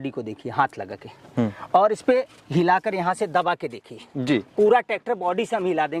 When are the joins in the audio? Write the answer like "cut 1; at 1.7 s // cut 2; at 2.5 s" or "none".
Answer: none